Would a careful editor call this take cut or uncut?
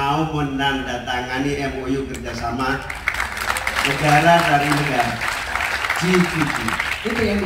uncut